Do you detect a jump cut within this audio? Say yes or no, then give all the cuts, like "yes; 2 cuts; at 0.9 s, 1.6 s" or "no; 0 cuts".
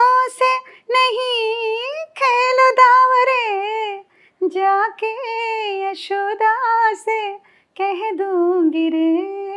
no; 0 cuts